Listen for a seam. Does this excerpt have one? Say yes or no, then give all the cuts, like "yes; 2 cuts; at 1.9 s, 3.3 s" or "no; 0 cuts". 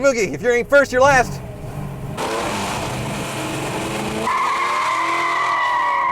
yes; 1 cut; at 2.2 s